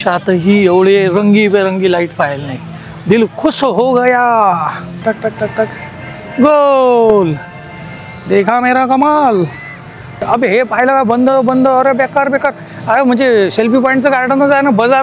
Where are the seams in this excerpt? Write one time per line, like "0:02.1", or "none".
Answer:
0:05.0
0:10.2